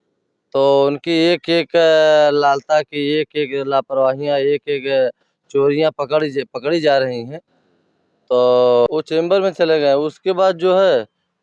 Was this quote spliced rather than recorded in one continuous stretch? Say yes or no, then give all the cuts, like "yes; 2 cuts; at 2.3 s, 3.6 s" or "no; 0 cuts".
yes; 1 cut; at 8.9 s